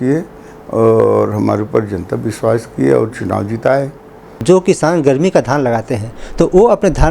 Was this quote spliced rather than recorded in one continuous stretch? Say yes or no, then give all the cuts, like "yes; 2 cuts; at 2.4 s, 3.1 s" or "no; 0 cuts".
yes; 1 cut; at 4.4 s